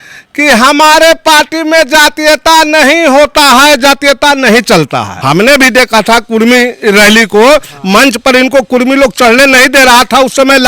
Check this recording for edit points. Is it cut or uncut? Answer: cut